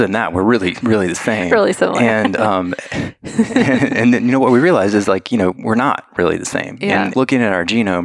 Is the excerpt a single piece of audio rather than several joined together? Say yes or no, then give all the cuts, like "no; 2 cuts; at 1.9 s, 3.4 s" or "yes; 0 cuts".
no; 1 cut; at 7.1 s